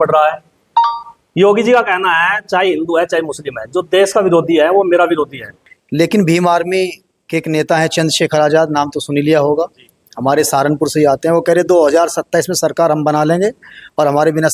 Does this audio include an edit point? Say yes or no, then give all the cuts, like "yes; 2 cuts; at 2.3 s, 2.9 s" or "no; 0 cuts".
yes; 1 cut; at 5.4 s